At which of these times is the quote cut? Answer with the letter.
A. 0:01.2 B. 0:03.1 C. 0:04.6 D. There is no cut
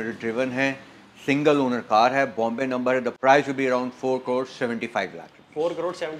D